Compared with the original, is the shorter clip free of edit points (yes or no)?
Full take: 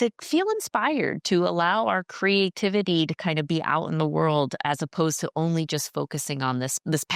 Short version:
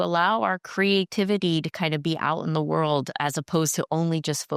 yes